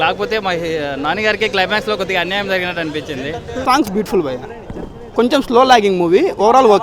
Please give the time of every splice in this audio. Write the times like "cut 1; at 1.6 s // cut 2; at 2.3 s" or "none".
cut 1; at 3.6 s